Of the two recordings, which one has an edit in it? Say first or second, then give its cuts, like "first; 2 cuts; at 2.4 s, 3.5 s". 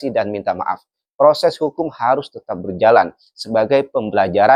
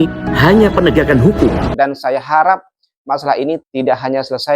second; 1 cut; at 1.7 s